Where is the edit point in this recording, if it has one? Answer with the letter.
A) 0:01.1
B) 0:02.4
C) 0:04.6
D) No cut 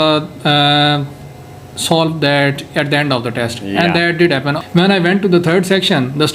C